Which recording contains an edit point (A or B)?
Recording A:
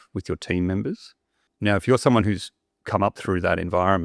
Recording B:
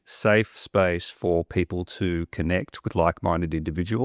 A